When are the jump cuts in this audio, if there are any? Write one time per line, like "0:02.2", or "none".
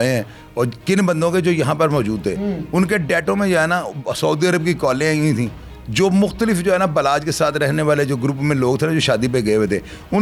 none

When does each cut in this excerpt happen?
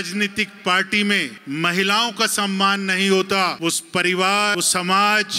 0:01.4
0:03.6
0:04.5

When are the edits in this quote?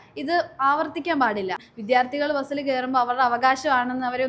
0:01.6

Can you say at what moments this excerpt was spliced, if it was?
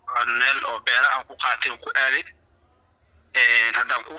none

